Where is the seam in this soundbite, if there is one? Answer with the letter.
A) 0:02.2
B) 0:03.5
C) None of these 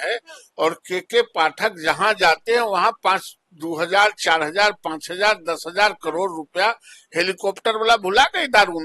C